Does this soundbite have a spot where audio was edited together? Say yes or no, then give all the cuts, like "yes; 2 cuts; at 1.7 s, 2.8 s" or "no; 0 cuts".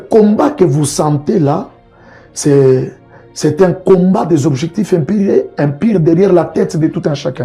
no; 0 cuts